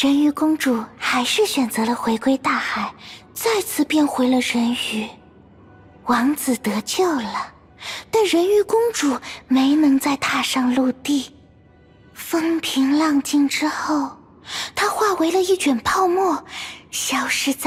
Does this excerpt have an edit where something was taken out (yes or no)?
no